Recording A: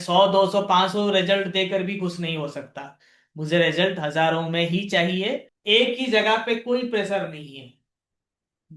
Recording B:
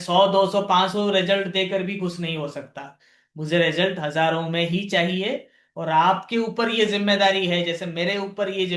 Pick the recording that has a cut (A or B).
A